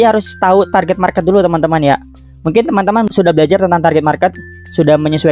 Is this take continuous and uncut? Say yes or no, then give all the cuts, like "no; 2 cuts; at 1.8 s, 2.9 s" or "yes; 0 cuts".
no; 1 cut; at 3.1 s